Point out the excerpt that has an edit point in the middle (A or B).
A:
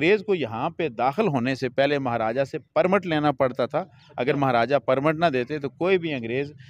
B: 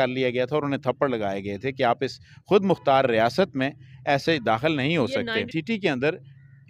B